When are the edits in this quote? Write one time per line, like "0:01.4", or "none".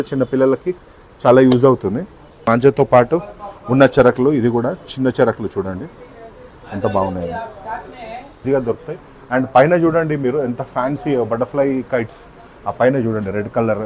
0:02.5
0:08.4

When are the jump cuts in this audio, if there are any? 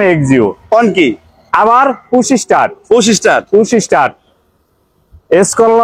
none

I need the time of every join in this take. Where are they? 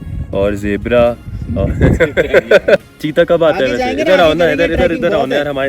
0:02.8

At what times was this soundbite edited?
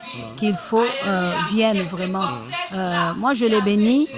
none

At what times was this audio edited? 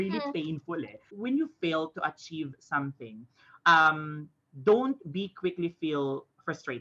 0:01.1

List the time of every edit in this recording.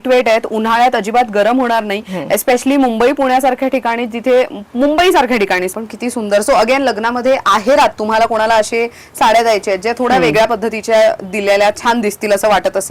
0:05.7

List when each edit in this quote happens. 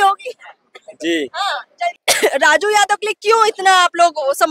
0:02.0

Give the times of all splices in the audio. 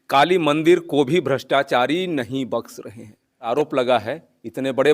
0:03.5

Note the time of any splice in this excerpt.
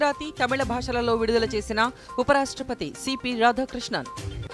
none

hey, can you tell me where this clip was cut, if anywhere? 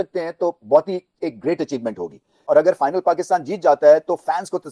0:02.3

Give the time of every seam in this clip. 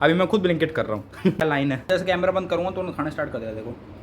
0:01.8

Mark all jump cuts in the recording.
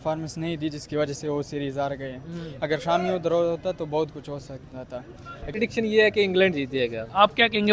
0:05.5

